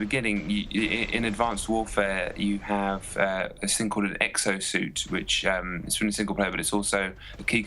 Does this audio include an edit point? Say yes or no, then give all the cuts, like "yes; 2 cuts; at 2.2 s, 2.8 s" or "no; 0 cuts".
no; 0 cuts